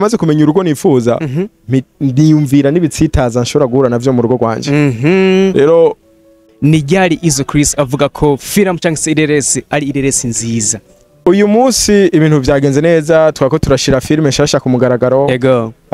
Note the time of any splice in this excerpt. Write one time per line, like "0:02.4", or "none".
0:06.4
0:11.2